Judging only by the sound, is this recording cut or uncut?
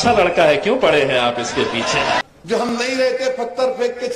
cut